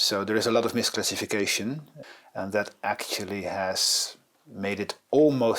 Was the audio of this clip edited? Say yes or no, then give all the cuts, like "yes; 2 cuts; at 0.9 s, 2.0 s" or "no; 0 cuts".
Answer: yes; 1 cut; at 1.9 s